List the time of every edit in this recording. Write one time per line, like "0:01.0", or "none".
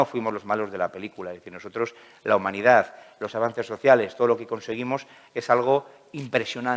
none